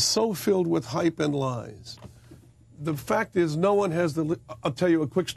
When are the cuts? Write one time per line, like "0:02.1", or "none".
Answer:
0:04.5